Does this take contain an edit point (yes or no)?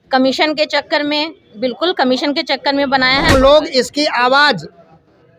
yes